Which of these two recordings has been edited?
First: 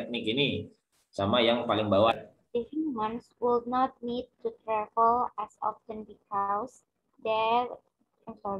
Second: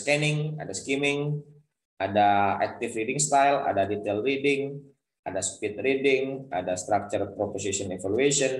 first; 1 cut; at 2.1 s

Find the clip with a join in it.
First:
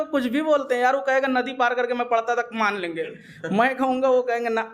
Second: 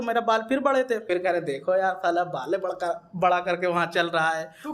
second; 1 cut; at 1.0 s

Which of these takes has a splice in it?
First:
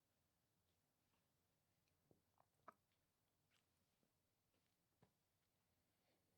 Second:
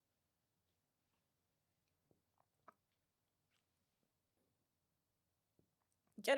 second; 1 cut; at 4.4 s

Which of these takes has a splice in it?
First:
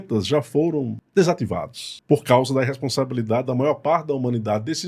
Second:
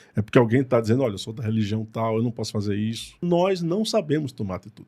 second; 1 cut; at 3.2 s

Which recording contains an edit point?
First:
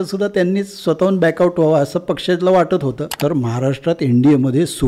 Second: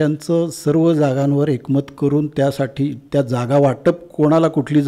first; 1 cut; at 3.2 s

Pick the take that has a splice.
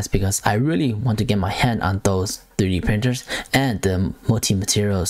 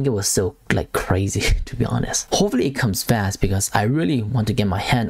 second; 1 cut; at 2.3 s

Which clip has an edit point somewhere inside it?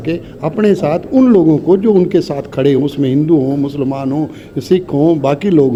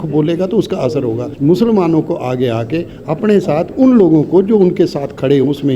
second; 1 cut; at 1.3 s

